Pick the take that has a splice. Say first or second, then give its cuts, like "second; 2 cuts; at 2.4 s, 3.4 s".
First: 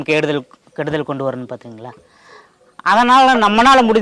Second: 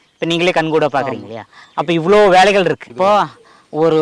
second; 1 cut; at 2.9 s